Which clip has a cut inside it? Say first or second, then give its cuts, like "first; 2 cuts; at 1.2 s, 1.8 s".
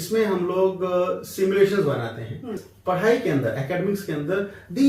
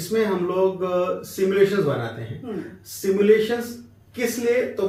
first; 1 cut; at 2.7 s